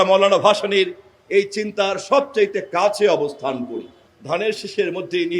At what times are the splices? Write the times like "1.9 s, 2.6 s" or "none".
4.0 s